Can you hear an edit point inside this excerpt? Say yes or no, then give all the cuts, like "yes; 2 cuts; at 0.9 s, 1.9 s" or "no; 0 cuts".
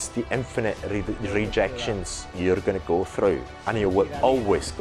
no; 0 cuts